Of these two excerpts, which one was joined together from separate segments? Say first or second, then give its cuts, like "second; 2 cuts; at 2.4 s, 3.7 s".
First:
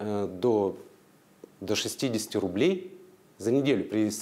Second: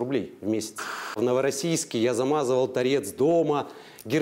second; 1 cut; at 1.2 s